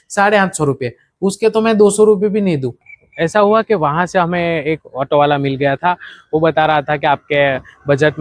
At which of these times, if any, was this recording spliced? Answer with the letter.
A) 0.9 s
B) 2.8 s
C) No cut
B